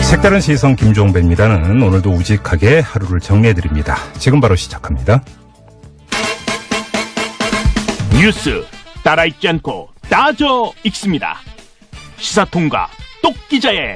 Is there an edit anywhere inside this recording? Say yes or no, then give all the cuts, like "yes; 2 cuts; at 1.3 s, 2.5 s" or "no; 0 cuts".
yes; 1 cut; at 11.1 s